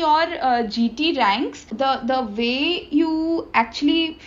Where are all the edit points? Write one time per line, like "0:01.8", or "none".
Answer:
0:01.7